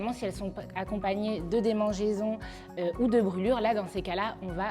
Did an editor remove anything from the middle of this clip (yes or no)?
no